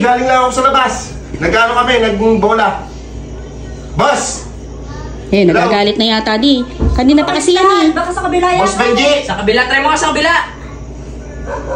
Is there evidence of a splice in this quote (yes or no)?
no